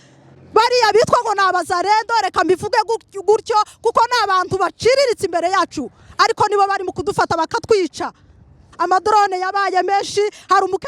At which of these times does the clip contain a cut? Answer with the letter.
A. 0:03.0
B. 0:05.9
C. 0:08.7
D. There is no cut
C